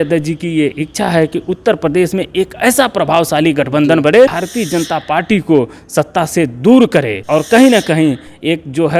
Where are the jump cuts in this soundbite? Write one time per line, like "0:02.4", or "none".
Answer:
0:04.4
0:07.2